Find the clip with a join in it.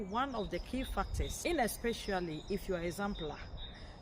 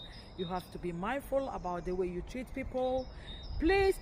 first; 1 cut; at 1.2 s

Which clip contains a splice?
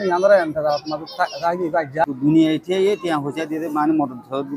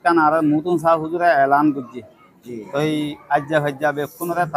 first; 1 cut; at 2.0 s

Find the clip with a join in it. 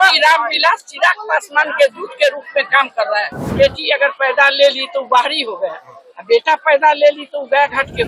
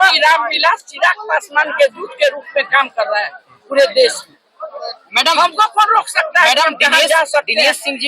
first; 1 cut; at 3.5 s

